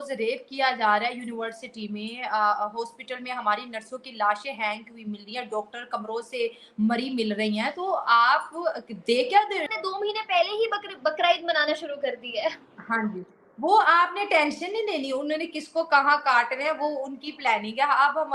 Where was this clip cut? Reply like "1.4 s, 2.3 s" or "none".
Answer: 9.7 s